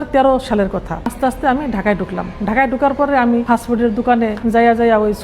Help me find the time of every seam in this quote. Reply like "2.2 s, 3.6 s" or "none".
1.0 s, 3.4 s, 4.4 s